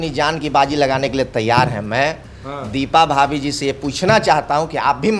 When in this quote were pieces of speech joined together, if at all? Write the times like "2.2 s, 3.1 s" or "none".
none